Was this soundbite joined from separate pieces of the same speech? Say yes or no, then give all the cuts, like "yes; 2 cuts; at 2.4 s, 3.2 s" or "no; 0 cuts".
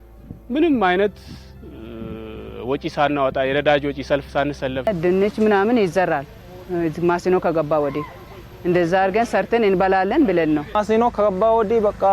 yes; 1 cut; at 4.9 s